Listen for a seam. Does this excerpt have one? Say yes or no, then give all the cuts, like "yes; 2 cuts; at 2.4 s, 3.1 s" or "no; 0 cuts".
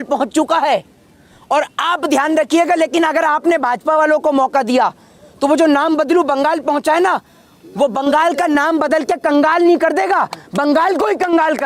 no; 0 cuts